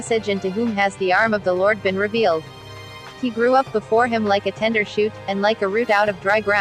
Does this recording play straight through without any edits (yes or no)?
no